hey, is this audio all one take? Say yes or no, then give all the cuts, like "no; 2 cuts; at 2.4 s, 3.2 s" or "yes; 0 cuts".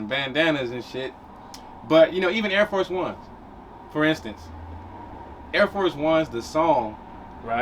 yes; 0 cuts